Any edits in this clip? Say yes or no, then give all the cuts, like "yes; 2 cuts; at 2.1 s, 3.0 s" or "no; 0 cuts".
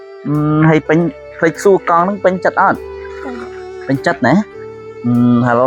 no; 0 cuts